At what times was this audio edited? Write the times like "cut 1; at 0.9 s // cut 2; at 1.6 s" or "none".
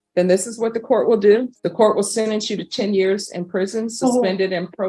cut 1; at 1.6 s

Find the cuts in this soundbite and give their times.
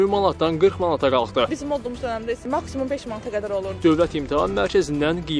cut 1; at 3.7 s

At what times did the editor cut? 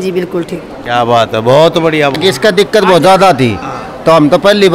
cut 1; at 2.2 s

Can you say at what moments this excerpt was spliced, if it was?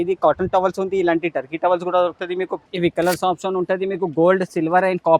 cut 1; at 2.6 s

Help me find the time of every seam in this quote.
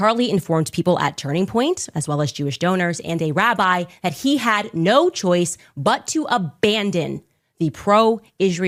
none

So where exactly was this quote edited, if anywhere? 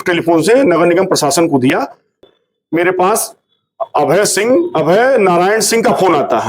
cut 1; at 2.2 s

